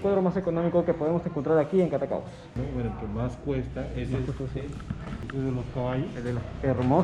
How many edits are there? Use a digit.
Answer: 2